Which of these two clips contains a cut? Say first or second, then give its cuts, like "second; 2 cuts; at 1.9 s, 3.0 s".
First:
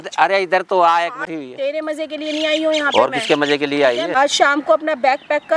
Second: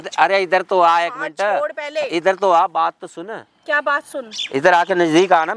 first; 2 cuts; at 1.3 s, 4.2 s